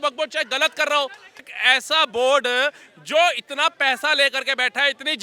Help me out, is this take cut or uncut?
cut